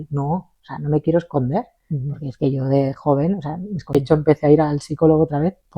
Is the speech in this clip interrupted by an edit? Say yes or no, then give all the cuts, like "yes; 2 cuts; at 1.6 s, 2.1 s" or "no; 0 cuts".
yes; 1 cut; at 3.9 s